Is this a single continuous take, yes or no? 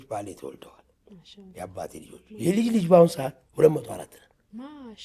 no